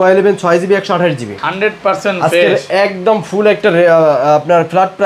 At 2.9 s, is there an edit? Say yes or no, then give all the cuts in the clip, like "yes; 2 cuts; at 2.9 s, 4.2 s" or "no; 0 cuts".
no; 0 cuts